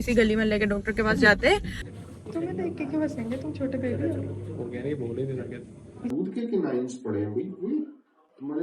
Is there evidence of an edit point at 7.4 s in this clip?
no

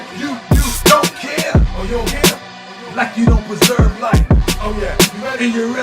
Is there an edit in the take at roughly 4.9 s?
no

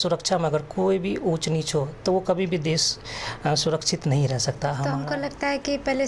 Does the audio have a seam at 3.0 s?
no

